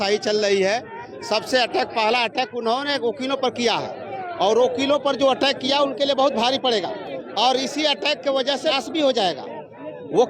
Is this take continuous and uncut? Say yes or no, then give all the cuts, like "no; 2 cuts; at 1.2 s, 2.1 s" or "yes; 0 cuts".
yes; 0 cuts